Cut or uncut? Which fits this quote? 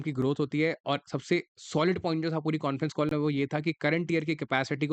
uncut